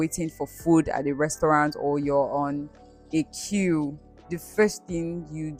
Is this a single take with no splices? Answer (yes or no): yes